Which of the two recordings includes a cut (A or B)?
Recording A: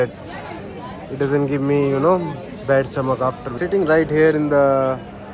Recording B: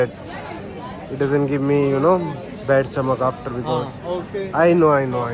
A